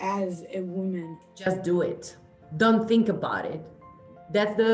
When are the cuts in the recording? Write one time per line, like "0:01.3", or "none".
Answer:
0:01.2